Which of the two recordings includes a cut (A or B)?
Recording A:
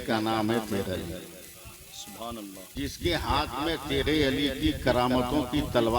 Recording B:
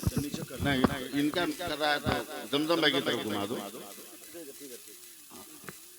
A